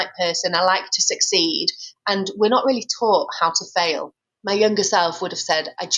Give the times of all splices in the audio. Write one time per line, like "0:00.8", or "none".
0:04.1